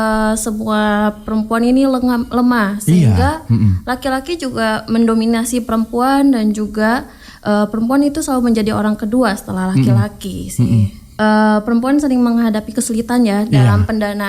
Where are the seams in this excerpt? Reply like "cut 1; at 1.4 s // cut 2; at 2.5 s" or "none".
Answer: cut 1; at 11.0 s

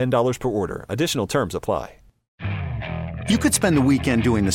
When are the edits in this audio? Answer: cut 1; at 2.2 s

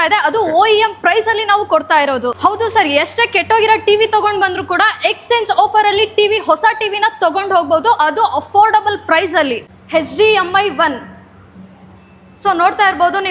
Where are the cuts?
cut 1; at 2.4 s // cut 2; at 9.7 s

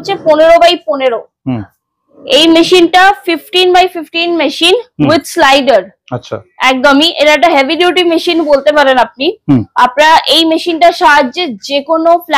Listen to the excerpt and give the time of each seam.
none

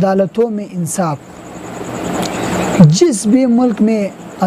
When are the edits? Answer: none

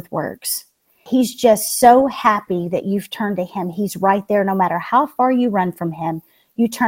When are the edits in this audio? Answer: cut 1; at 0.9 s

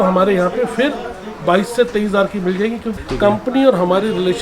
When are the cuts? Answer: cut 1; at 2.9 s

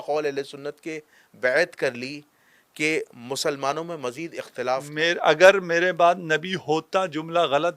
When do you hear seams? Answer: cut 1; at 4.9 s

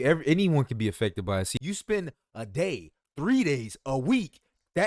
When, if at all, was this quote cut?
cut 1; at 1.5 s

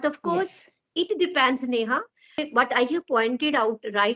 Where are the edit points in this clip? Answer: cut 1; at 2.4 s

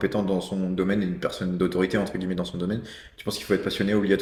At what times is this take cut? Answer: none

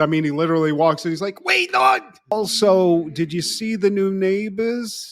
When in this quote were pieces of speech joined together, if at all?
cut 1; at 2.3 s

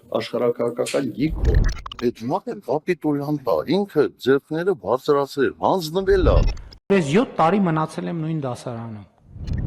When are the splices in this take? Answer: none

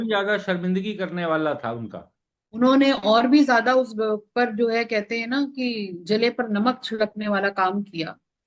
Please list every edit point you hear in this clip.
none

